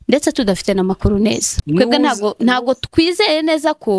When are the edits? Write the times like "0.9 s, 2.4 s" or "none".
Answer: 1.5 s